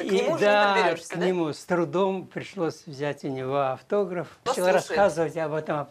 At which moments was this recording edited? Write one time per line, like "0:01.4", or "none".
0:04.5

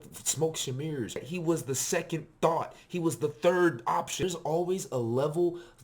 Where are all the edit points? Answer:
0:01.2
0:04.2

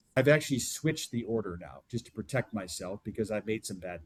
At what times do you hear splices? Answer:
none

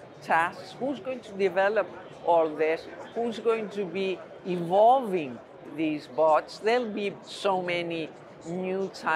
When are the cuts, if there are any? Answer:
0:05.7

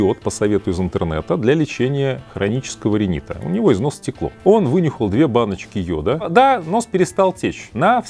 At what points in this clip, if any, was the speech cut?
0:06.2

